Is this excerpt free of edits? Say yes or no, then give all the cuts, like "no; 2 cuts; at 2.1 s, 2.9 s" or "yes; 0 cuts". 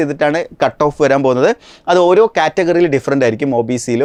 yes; 0 cuts